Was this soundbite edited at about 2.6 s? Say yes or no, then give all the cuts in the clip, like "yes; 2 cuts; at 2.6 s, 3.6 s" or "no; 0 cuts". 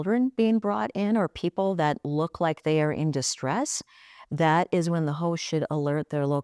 no; 0 cuts